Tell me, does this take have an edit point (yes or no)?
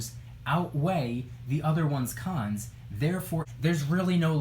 yes